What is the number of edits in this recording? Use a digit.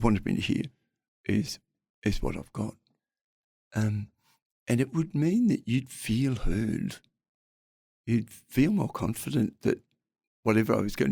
0